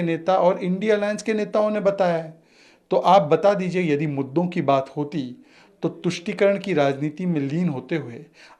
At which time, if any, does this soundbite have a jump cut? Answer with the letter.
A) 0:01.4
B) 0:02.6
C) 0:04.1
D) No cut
D